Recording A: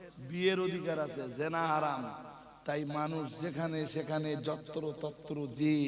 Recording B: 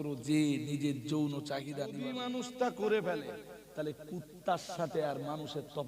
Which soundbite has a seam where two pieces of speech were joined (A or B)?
B